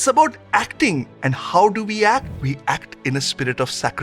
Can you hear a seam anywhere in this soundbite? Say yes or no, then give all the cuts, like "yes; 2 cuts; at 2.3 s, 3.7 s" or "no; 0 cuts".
yes; 1 cut; at 1.1 s